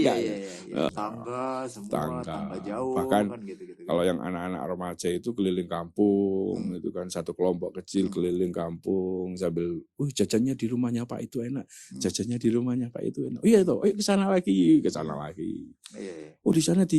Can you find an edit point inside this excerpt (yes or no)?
yes